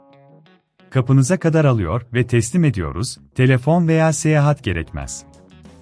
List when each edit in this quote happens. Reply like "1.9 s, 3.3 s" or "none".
0.9 s, 5.1 s